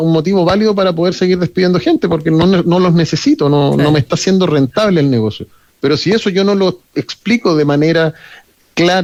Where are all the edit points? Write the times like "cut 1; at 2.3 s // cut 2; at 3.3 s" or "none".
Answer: none